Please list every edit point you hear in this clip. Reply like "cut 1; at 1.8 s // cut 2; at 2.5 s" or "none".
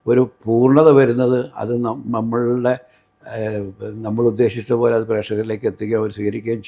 none

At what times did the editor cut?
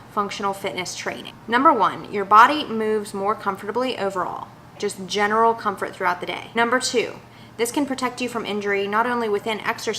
cut 1; at 4.8 s // cut 2; at 6.5 s

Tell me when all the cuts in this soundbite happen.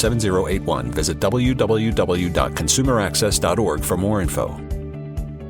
cut 1; at 4.5 s

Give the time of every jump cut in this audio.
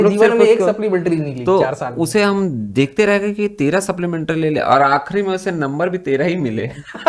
none

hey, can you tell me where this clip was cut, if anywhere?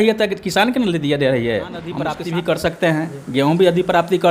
cut 1; at 2.0 s

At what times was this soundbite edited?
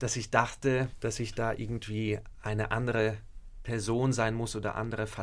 cut 1; at 0.9 s

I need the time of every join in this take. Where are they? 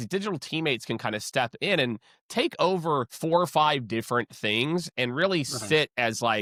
none

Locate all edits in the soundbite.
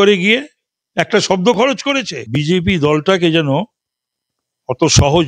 cut 1; at 2.2 s

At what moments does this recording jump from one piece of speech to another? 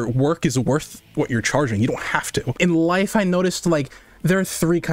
cut 1; at 2.5 s

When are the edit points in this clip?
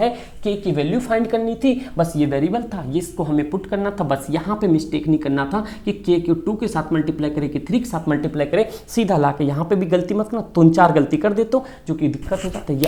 none

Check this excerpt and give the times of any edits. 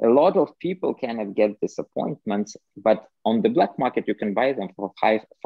none

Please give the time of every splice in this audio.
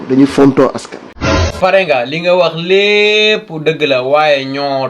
cut 1; at 1.5 s

